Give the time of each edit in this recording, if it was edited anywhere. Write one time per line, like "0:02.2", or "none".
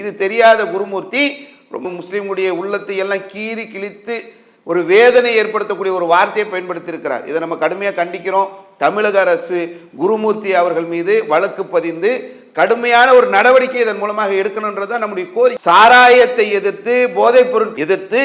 0:01.8
0:15.6